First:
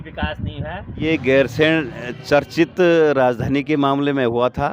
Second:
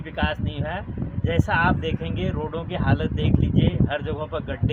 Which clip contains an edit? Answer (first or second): first